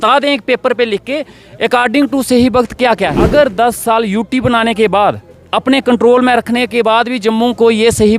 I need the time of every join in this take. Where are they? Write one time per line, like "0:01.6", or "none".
0:03.2